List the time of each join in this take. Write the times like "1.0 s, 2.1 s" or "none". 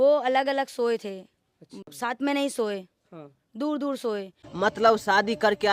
4.4 s